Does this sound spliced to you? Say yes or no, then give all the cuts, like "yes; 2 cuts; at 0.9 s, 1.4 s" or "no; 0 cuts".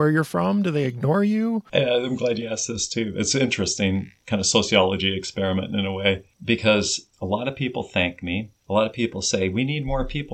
yes; 5 cuts; at 1.6 s, 4.2 s, 6.3 s, 7.0 s, 8.5 s